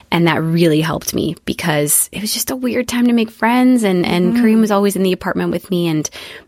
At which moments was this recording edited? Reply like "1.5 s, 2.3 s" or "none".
none